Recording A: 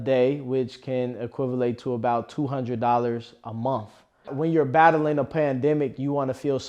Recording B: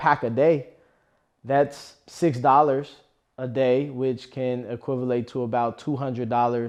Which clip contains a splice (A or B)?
A